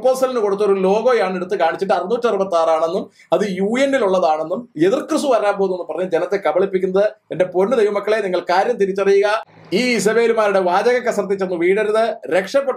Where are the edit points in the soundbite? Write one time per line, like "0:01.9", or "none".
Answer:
none